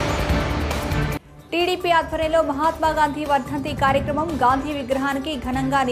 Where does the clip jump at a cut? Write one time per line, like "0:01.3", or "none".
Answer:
none